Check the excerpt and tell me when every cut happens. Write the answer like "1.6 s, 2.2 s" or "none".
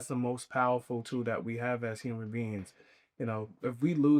none